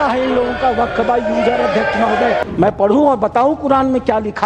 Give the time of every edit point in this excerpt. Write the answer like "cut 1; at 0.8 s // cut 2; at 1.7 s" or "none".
cut 1; at 2.4 s